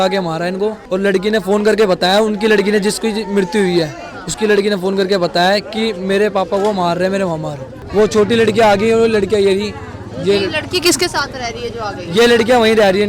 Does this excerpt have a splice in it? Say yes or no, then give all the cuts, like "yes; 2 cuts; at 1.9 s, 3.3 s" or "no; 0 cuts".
no; 0 cuts